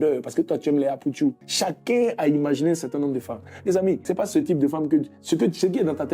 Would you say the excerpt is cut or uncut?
cut